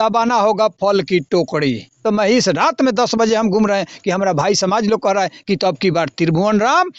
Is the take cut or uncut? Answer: cut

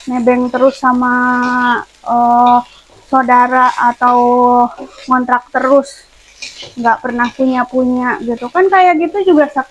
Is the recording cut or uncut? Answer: uncut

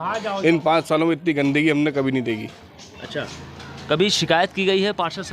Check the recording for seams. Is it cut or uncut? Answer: uncut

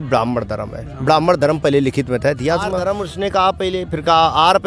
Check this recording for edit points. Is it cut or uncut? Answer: cut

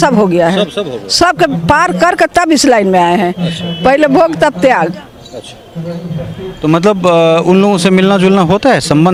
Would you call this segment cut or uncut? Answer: uncut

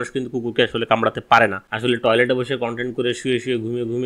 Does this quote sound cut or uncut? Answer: cut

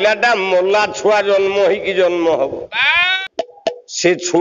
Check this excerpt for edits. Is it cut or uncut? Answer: cut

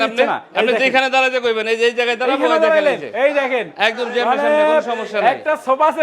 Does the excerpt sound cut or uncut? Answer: uncut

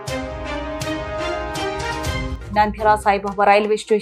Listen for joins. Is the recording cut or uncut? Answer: cut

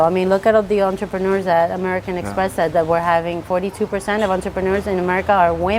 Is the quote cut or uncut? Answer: uncut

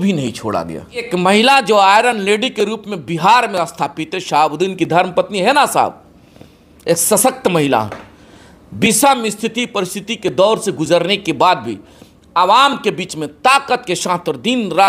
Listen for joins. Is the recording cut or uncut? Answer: cut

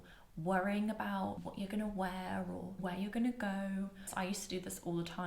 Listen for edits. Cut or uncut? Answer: cut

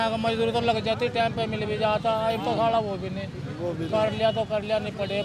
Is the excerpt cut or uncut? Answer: uncut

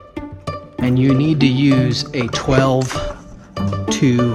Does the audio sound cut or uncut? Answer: uncut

